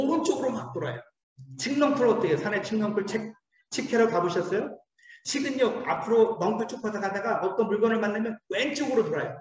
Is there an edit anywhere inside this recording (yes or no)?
no